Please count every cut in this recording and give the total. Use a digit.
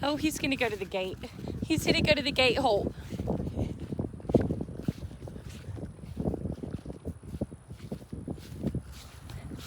0